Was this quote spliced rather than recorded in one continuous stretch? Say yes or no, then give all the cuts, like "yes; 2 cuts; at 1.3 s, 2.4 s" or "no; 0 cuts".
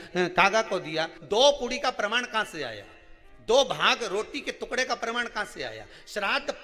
yes; 1 cut; at 1.2 s